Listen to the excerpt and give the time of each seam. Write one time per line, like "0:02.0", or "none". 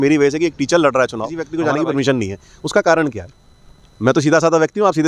0:01.4

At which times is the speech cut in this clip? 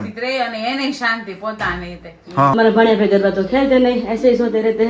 0:02.5

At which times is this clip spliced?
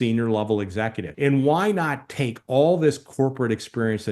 0:01.0

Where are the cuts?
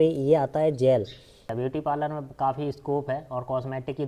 0:01.5

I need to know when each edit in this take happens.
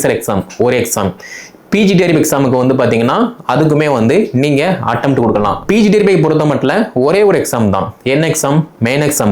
0:05.6

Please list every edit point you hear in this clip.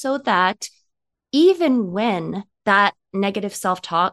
0:02.5

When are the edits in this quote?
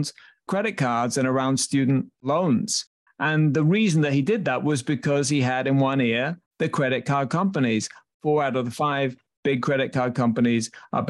0:08.2

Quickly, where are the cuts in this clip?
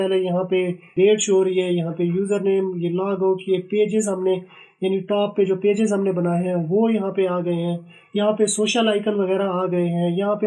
0:00.9

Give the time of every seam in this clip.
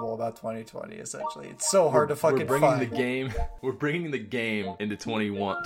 0:03.4
0:04.7

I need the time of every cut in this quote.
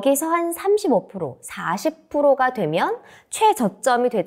none

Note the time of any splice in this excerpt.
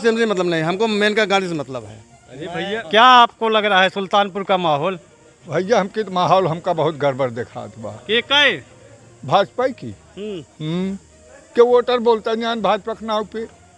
0:02.8

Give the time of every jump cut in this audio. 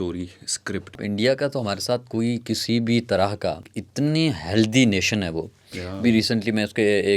0:01.0
0:03.8

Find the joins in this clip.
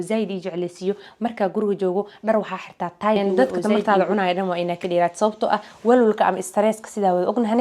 0:03.7

